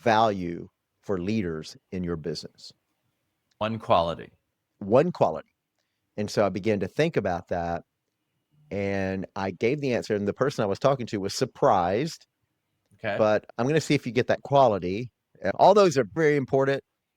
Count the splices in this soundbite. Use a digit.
2